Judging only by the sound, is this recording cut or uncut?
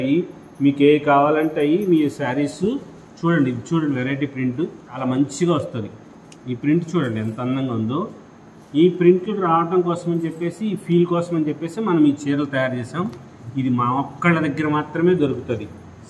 uncut